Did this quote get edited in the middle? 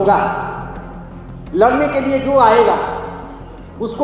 no; 0 cuts

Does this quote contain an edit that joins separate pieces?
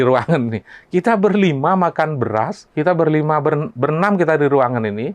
yes; 1 cut; at 2.6 s

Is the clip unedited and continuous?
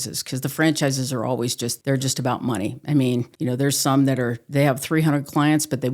no; 2 cuts; at 1.7 s, 3.3 s

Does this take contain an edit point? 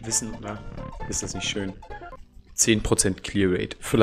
yes; 1 cut; at 2.2 s

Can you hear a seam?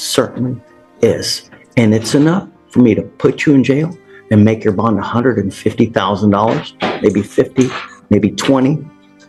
no; 0 cuts

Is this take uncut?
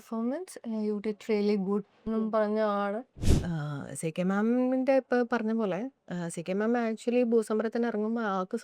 no; 1 cut; at 3.3 s

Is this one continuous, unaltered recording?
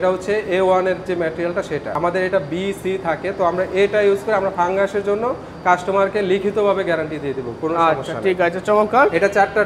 yes; 0 cuts

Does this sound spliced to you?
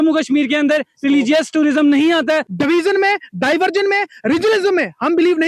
yes; 1 cut; at 2.5 s

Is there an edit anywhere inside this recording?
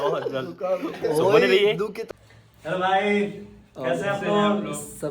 yes; 1 cut; at 1.9 s

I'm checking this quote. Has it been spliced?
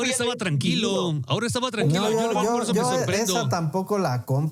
no; 0 cuts

